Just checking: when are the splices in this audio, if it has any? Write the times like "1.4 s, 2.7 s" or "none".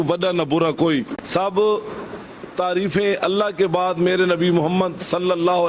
1.2 s

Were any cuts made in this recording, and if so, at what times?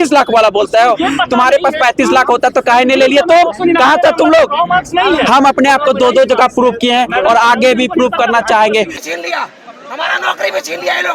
8.9 s

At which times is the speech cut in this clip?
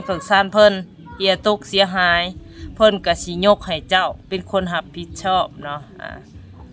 none

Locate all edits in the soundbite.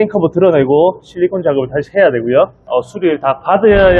2.6 s

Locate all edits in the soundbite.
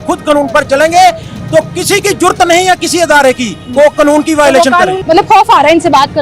5.0 s

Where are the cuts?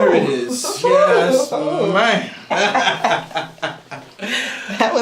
2.5 s

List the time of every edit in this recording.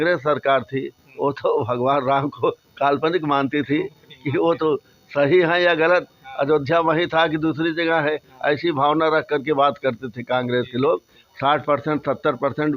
11.2 s

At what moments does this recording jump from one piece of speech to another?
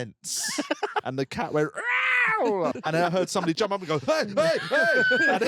1.0 s, 2.7 s

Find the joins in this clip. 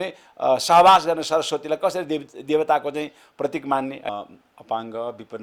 4.1 s

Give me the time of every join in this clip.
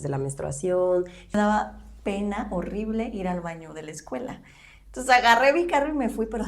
1.3 s

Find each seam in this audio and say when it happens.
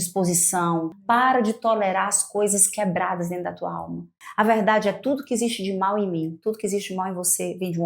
0.9 s, 4.2 s

